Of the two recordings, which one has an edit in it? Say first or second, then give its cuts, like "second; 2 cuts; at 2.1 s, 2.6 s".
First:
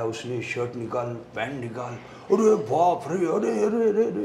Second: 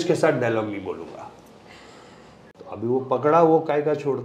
second; 1 cut; at 2.5 s